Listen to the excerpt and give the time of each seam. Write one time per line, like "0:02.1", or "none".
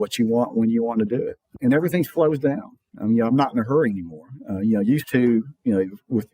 0:01.5